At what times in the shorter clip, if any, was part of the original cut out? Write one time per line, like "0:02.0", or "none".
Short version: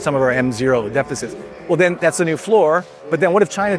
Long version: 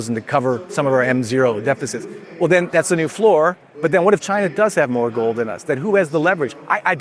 none